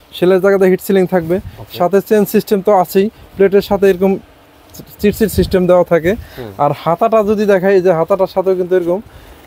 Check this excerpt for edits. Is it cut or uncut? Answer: uncut